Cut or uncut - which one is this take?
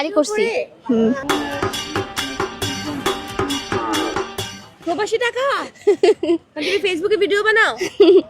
uncut